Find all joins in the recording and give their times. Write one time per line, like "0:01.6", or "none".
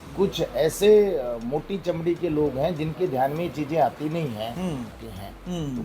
0:04.9